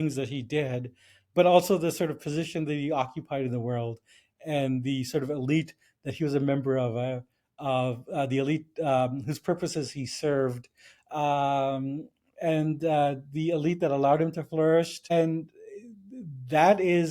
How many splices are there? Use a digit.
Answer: 1